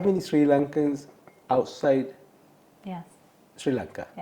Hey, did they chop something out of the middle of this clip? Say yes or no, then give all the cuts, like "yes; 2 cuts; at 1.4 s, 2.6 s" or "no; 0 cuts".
no; 0 cuts